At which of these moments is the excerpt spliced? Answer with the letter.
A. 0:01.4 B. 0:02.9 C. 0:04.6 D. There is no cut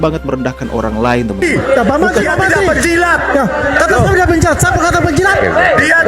A